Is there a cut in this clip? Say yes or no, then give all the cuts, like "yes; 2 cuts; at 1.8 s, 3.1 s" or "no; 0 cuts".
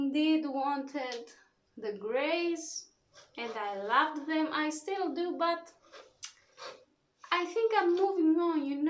no; 0 cuts